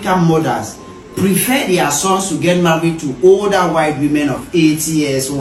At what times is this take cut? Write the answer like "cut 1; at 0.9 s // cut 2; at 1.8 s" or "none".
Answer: none